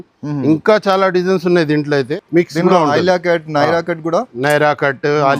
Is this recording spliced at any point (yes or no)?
yes